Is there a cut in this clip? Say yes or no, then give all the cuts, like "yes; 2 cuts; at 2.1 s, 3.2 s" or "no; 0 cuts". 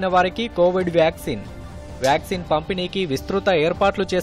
no; 0 cuts